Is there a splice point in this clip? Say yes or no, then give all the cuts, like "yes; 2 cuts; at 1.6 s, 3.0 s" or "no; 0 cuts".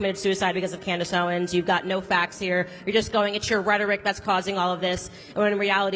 no; 0 cuts